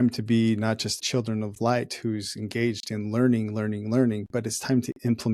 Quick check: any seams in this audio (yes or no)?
yes